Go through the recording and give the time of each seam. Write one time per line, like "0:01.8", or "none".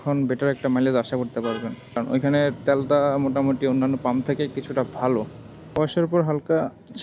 0:02.2
0:05.8